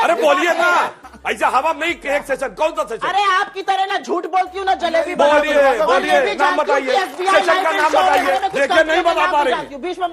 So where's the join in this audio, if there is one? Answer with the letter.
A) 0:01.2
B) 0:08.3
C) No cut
B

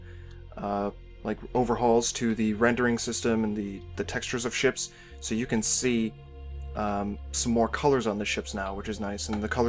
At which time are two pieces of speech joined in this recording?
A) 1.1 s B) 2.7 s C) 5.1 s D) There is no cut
C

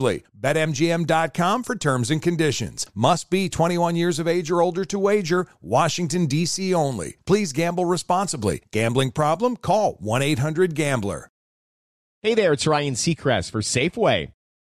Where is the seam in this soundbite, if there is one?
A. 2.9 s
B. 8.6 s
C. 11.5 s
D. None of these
C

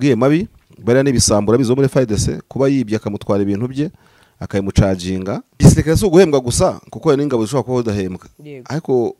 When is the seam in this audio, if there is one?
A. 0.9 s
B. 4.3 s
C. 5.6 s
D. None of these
C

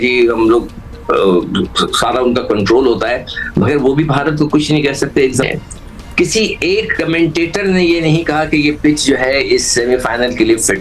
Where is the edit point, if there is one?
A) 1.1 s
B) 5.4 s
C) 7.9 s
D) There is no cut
B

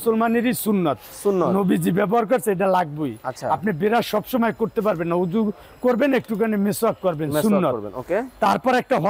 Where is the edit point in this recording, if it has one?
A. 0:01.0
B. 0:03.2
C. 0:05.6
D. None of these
D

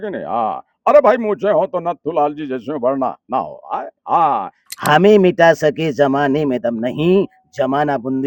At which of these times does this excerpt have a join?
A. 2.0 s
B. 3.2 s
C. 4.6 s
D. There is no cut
C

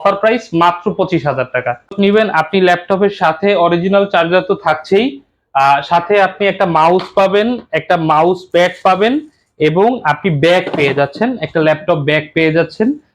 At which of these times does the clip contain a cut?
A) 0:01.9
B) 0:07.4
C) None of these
A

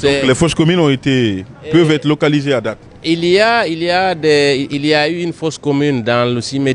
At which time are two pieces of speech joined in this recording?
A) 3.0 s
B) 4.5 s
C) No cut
C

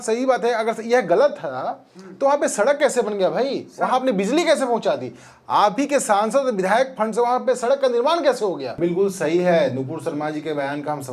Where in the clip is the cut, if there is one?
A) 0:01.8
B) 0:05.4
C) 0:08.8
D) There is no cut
C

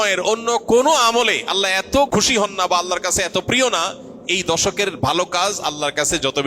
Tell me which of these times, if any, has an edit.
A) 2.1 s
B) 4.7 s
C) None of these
A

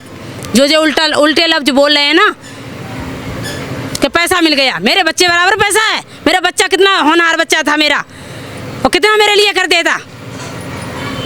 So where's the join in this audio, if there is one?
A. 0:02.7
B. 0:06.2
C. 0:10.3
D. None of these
D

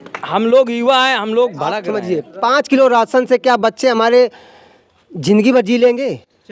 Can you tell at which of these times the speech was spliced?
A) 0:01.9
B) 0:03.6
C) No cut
A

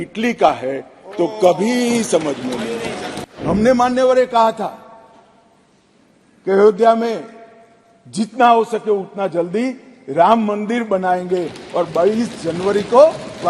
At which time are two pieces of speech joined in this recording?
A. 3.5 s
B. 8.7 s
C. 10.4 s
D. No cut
A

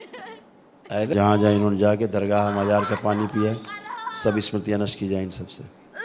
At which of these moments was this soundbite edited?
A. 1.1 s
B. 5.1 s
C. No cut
A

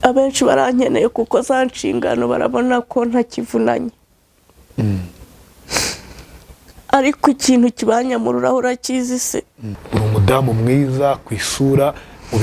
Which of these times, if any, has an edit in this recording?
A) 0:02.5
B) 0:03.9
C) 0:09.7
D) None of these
C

